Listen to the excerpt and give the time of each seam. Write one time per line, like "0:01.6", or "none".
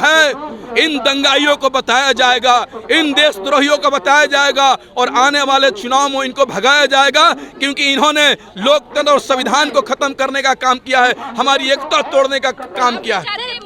none